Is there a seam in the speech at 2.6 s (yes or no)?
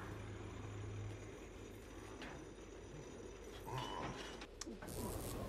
no